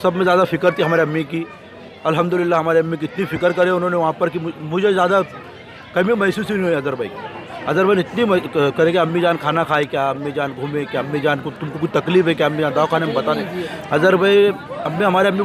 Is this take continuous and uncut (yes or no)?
yes